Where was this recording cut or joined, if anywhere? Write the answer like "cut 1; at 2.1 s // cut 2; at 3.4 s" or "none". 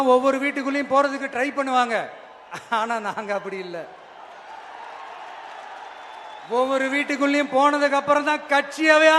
none